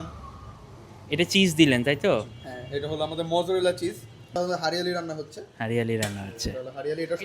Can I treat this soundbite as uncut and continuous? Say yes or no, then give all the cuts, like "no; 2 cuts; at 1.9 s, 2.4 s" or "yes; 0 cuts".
no; 1 cut; at 4.4 s